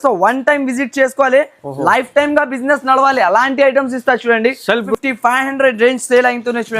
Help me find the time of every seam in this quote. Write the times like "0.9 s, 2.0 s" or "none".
4.9 s